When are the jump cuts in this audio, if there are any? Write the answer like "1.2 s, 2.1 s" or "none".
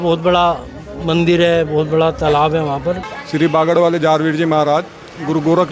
3.2 s